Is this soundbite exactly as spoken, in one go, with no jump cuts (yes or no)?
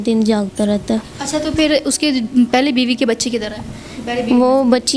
yes